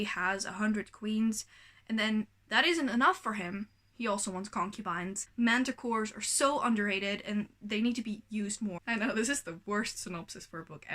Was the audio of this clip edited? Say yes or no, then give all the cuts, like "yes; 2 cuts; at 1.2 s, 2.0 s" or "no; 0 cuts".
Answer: yes; 2 cuts; at 5.2 s, 8.8 s